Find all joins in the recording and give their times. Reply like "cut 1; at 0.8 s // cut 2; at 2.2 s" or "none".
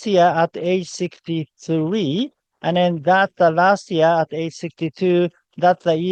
none